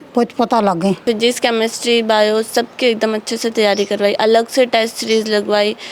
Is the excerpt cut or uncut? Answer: cut